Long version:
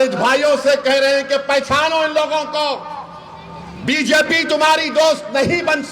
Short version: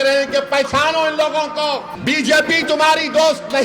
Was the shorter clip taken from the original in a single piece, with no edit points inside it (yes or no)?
no